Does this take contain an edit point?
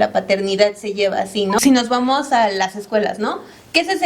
yes; 1 cut; at 1.6 s

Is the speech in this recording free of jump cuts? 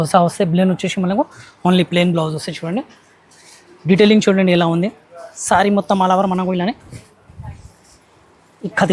yes; 0 cuts

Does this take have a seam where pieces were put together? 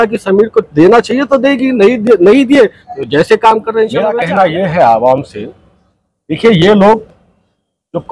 yes; 1 cut; at 4.1 s

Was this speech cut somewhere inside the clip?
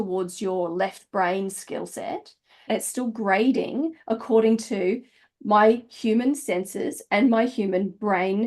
yes; 1 cut; at 2.6 s

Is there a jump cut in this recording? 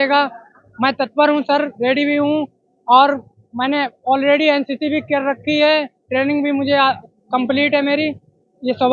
yes; 1 cut; at 7.1 s

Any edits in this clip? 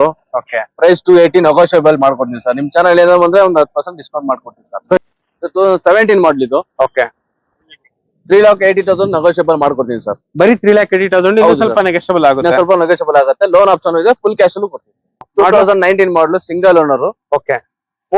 yes; 2 cuts; at 5.0 s, 15.3 s

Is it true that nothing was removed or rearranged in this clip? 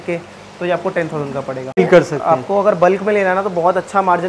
no; 1 cut; at 1.8 s

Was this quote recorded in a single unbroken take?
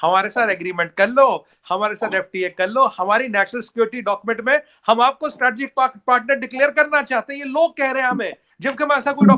yes; 0 cuts

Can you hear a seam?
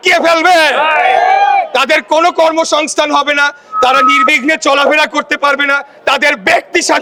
no; 0 cuts

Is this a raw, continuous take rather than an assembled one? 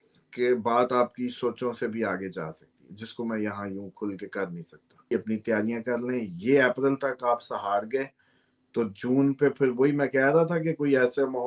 no; 1 cut; at 5.1 s

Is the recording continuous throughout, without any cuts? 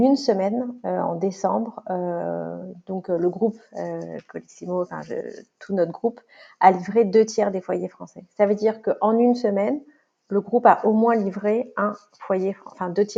yes; 0 cuts

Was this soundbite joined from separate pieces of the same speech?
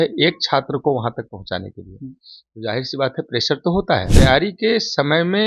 yes; 1 cut; at 4.1 s

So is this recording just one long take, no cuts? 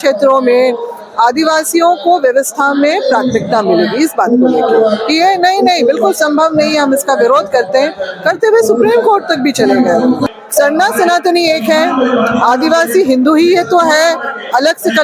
no; 1 cut; at 10.3 s

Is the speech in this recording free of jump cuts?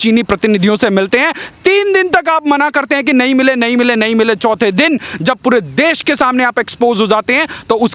yes; 0 cuts

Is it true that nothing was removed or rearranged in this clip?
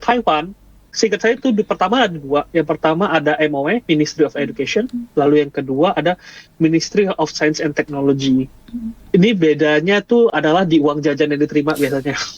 no; 1 cut; at 0.9 s

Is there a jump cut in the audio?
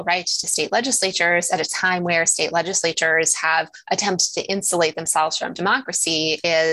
no; 0 cuts

